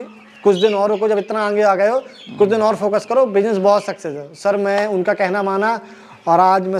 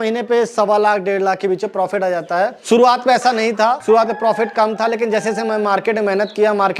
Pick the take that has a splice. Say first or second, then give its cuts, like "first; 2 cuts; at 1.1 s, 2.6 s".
second; 2 cuts; at 2.6 s, 3.8 s